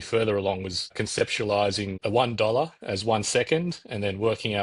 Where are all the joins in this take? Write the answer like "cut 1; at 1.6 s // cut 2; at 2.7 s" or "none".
cut 1; at 0.9 s // cut 2; at 1.9 s